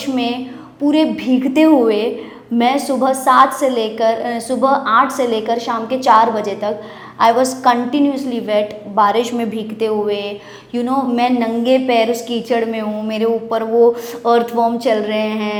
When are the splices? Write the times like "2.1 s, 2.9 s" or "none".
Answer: none